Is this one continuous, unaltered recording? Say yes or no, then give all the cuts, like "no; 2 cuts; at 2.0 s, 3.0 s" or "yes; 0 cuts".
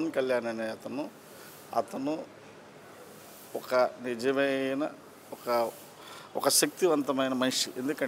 yes; 0 cuts